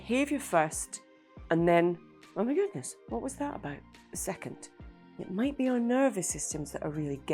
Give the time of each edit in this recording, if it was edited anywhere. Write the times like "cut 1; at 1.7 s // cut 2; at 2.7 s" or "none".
cut 1; at 5.0 s